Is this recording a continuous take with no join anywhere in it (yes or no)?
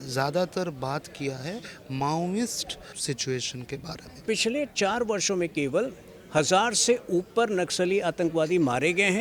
no